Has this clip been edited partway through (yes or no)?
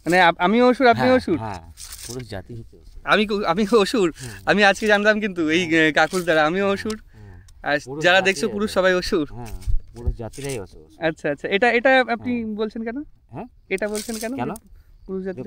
no